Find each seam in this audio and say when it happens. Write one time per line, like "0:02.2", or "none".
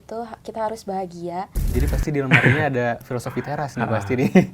0:01.6